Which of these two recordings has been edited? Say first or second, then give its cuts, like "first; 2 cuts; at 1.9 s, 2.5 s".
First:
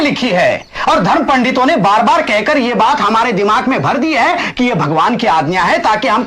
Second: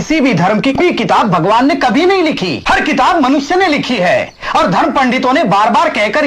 second; 2 cuts; at 0.8 s, 2.5 s